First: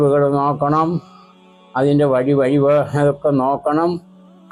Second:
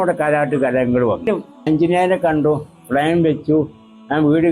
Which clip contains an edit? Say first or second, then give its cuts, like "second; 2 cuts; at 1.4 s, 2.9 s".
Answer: second; 1 cut; at 1.5 s